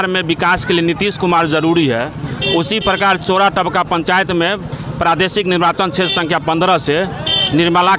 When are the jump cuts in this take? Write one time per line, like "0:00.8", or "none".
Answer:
none

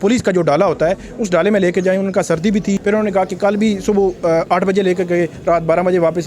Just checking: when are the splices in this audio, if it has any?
0:02.8

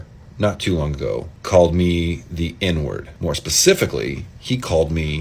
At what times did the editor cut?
0:01.3
0:03.1

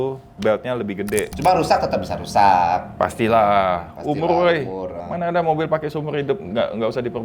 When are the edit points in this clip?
0:01.3

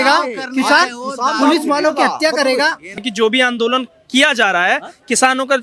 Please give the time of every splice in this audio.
0:03.0

